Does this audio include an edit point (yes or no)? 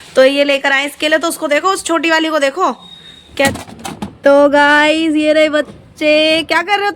yes